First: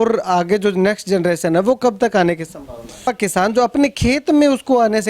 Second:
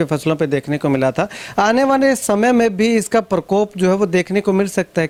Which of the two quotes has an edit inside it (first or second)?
first